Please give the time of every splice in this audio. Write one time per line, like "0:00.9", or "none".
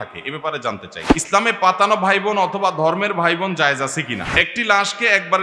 0:01.0
0:04.3